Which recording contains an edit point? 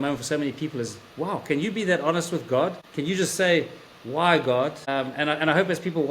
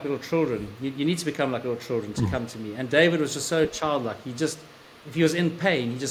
first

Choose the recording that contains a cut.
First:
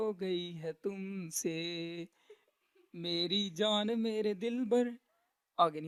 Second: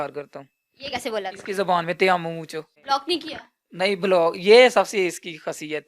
second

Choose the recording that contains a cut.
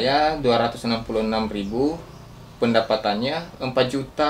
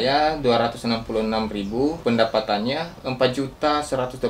second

